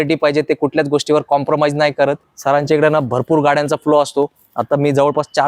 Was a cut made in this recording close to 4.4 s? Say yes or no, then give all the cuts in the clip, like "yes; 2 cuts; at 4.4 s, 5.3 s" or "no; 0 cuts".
no; 1 cut; at 2.3 s